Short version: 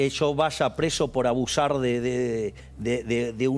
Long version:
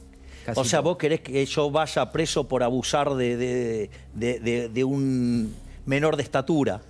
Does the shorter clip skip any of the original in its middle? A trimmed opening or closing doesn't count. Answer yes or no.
no